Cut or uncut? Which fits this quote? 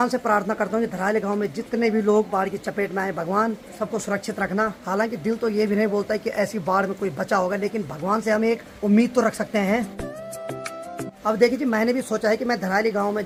uncut